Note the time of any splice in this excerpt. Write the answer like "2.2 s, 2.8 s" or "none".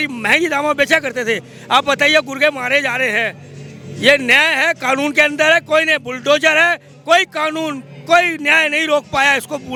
none